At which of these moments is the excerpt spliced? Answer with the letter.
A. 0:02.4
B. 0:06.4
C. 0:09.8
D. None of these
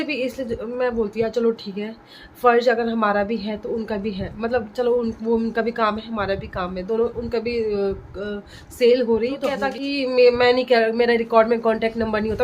C